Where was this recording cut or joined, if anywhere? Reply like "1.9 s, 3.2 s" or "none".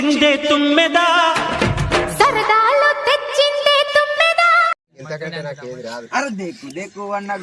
5.0 s